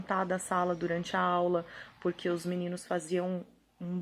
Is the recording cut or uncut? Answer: uncut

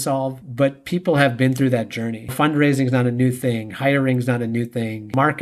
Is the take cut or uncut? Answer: cut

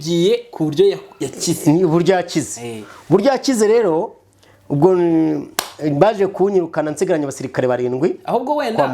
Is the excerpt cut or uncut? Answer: uncut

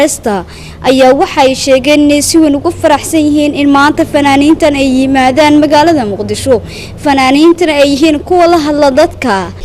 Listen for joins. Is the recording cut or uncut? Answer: cut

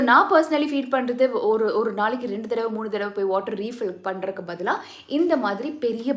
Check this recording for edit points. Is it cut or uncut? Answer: uncut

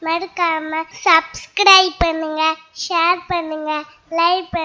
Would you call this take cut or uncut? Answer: cut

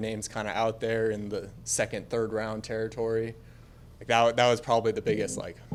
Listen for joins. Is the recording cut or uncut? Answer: uncut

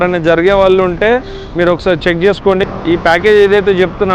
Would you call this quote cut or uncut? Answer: cut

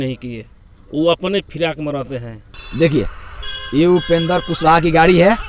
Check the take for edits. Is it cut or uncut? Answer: cut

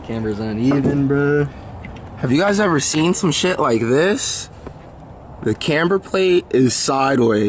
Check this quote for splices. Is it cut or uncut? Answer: uncut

